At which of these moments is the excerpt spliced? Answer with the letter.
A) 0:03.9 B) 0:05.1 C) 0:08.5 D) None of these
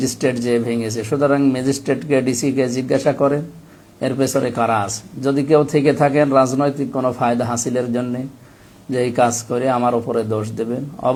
D